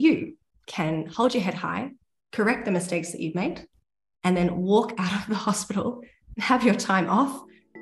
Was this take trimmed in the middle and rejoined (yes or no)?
no